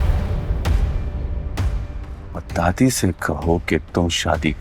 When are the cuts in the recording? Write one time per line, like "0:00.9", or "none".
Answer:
none